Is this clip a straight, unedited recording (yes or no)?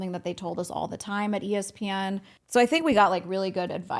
no